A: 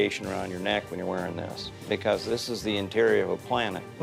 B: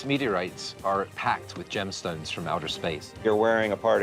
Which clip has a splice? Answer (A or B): B